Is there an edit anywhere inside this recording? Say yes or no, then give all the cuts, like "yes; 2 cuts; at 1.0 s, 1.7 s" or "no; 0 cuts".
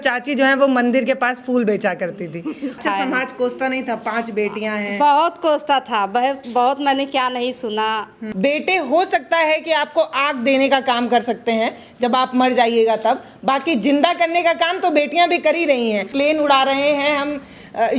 yes; 3 cuts; at 2.8 s, 8.2 s, 16.1 s